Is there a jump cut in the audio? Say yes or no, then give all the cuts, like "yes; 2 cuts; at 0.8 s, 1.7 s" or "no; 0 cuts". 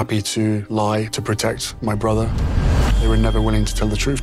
no; 0 cuts